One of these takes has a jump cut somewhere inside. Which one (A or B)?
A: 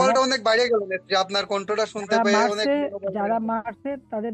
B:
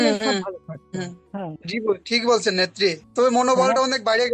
B